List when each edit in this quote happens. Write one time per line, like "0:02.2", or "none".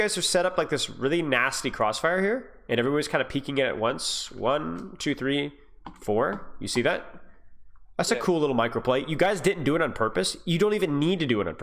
none